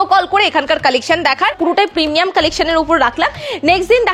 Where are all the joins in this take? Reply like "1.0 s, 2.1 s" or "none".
1.6 s